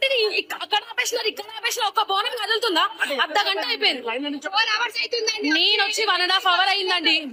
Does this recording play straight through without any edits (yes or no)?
yes